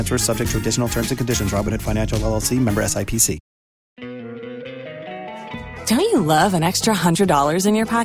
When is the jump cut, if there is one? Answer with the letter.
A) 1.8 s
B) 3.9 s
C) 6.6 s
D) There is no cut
B